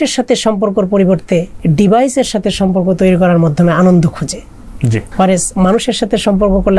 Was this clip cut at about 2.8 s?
no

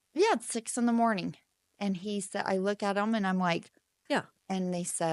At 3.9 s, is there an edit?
yes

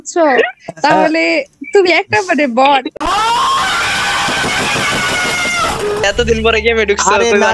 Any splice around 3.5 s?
no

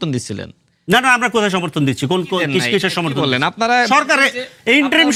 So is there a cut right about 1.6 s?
no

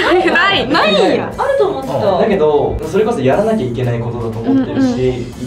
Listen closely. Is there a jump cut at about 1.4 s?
no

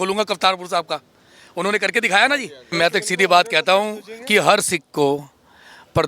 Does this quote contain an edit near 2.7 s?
yes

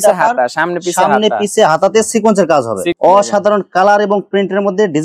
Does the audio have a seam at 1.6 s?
no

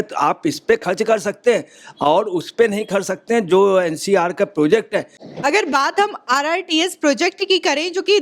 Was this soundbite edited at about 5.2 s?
no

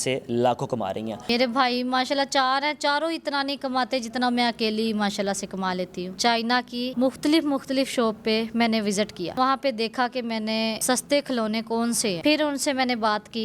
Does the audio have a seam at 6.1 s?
yes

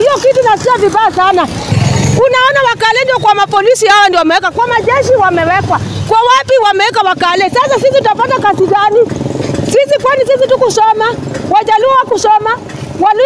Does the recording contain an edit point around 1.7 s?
yes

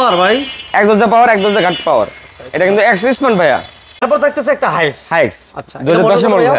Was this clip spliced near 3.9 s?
yes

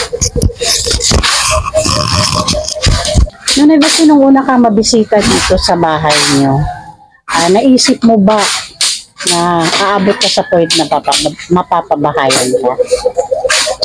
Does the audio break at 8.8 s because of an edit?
no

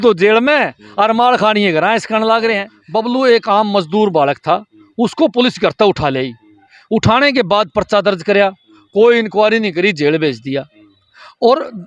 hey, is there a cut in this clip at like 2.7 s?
yes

